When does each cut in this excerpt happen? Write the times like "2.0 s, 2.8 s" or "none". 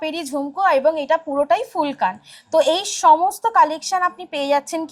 none